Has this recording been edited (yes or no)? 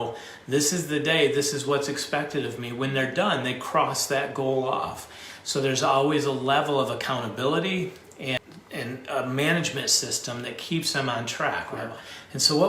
yes